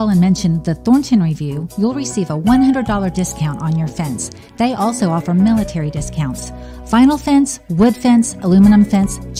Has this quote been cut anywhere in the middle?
no; 0 cuts

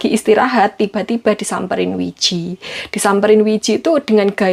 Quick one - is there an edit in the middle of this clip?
no; 0 cuts

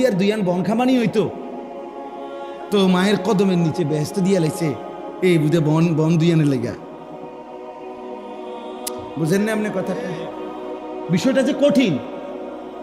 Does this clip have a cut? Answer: yes; 4 cuts; at 1.4 s, 2.7 s, 7.3 s, 9.1 s

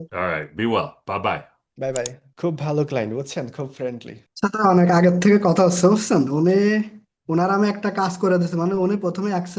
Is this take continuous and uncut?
no; 1 cut; at 2.2 s

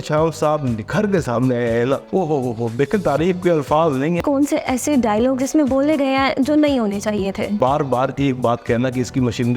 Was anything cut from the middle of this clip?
yes; 3 cuts; at 2.0 s, 4.2 s, 7.5 s

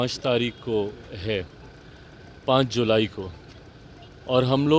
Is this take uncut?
yes; 0 cuts

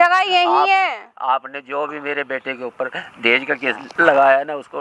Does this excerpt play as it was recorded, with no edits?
no; 1 cut; at 3.9 s

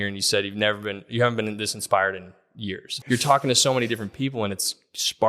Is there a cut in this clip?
yes; 1 cut; at 2.9 s

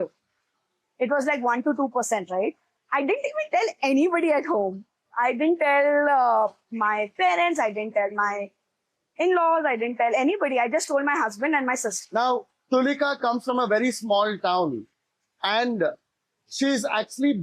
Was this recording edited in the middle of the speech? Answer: yes; 2 cuts; at 2.7 s, 11.9 s

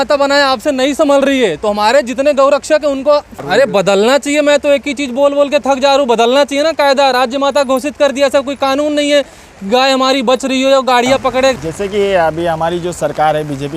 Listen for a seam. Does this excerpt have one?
yes; 2 cuts; at 3.3 s, 11.5 s

